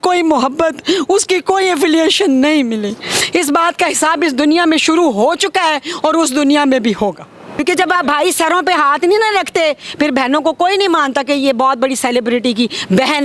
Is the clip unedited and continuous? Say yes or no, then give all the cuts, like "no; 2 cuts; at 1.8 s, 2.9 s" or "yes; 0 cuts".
no; 1 cut; at 7.6 s